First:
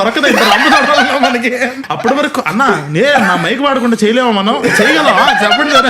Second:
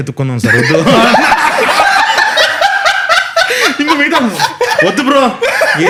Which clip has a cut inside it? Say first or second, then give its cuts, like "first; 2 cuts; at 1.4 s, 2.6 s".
first; 1 cut; at 1.8 s